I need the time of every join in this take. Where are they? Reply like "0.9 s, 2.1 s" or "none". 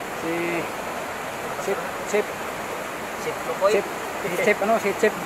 none